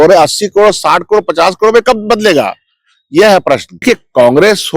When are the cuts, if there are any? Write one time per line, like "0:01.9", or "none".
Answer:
0:03.7